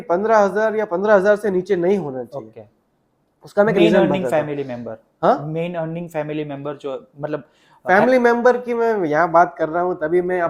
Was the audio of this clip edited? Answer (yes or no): no